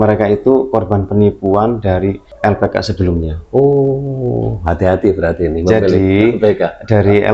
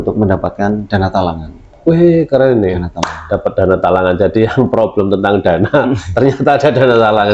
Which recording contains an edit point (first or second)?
first